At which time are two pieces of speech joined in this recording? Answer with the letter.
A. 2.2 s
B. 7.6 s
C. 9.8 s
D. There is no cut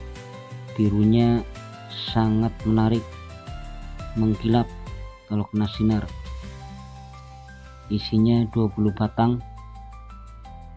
C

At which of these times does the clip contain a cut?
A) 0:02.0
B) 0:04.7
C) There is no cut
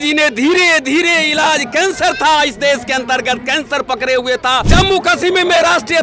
B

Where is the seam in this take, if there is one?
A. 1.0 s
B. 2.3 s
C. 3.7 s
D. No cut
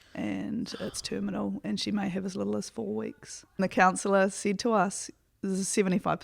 C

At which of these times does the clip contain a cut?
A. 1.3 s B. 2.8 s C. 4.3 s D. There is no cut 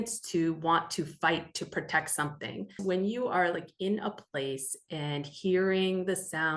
B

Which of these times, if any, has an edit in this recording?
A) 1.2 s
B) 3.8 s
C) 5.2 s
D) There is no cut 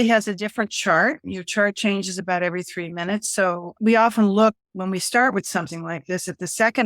B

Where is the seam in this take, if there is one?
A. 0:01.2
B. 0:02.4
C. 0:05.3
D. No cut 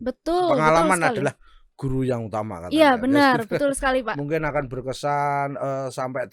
D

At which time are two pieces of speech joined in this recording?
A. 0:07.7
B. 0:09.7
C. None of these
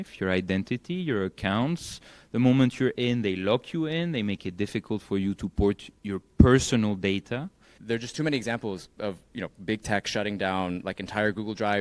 A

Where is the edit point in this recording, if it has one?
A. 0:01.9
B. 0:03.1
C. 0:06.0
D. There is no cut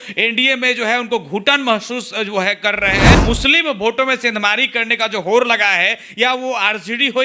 B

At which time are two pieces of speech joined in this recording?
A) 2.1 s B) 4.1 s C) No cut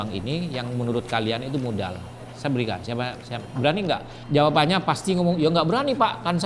A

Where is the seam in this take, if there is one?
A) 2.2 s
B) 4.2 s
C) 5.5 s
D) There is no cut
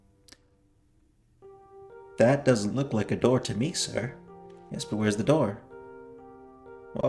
D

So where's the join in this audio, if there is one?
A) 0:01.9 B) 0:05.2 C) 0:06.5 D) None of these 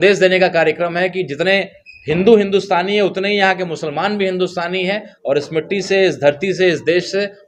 D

